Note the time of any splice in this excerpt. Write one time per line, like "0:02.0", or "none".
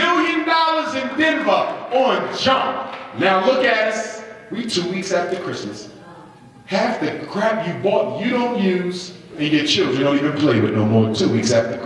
none

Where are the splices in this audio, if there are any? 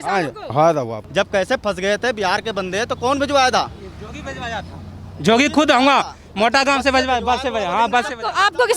0:01.0

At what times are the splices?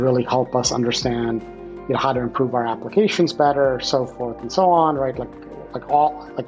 none

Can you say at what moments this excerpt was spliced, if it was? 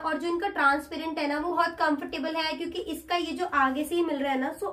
0:01.5

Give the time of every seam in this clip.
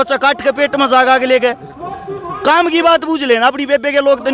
none

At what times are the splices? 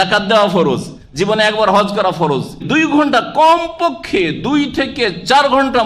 0:02.6

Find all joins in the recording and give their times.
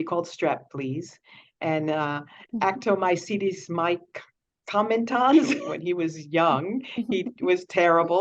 0:05.6

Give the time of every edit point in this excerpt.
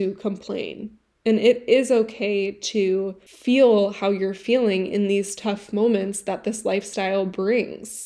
0:03.3

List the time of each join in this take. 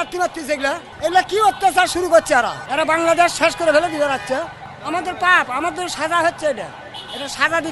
0:00.9
0:02.6
0:04.7

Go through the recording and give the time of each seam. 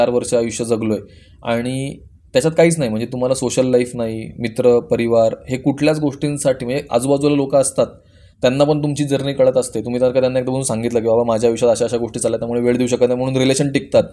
none

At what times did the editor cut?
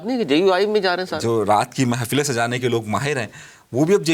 0:01.1

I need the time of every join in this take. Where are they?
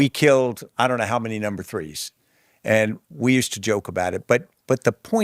none

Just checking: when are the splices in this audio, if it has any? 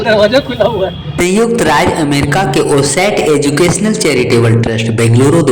0:01.3

